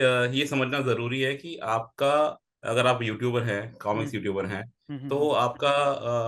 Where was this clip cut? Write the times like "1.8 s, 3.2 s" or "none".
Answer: 2.5 s